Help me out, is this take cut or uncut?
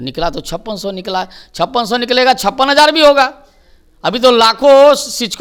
uncut